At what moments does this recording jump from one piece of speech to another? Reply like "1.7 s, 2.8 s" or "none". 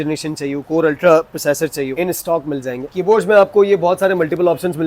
2.9 s